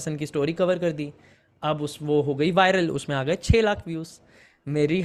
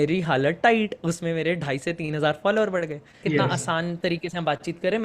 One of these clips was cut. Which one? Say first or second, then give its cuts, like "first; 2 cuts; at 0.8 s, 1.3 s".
second; 1 cut; at 3.2 s